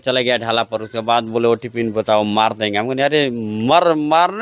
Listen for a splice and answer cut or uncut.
uncut